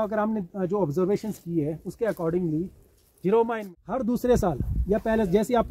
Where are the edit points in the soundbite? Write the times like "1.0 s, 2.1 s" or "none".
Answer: 3.6 s